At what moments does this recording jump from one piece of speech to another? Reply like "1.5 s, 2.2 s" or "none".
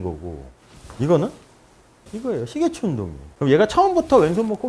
2.1 s, 3.2 s